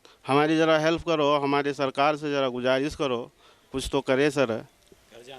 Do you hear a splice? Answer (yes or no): no